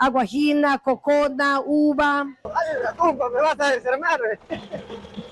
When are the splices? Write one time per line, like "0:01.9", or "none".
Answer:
0:02.5